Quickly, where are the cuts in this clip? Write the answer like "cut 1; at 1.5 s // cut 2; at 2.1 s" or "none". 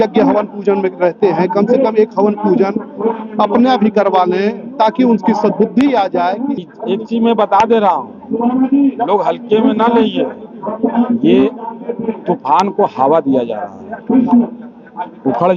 cut 1; at 6.6 s